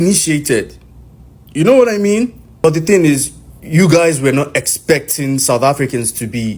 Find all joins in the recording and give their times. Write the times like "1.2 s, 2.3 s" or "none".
2.5 s